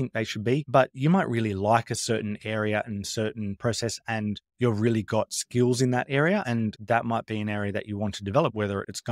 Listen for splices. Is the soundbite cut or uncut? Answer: uncut